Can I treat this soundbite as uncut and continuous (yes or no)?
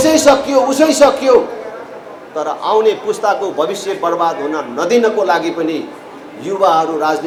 yes